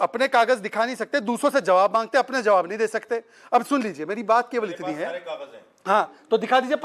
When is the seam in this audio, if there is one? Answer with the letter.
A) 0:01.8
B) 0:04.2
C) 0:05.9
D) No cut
D